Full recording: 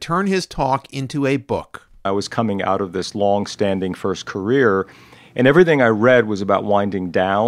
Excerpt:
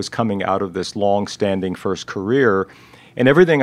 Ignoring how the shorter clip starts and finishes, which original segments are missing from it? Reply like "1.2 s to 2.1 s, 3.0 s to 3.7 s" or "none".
none